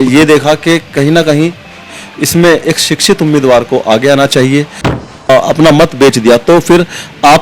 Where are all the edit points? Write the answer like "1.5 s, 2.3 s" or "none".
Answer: 5.3 s